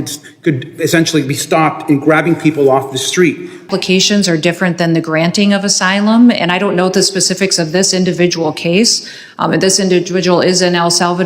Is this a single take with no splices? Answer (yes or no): no